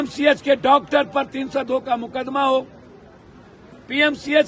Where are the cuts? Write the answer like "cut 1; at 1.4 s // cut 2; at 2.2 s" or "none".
none